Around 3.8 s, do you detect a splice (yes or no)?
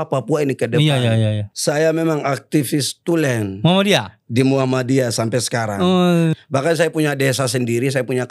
no